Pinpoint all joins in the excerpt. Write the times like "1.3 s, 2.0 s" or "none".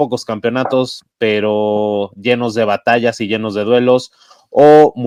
none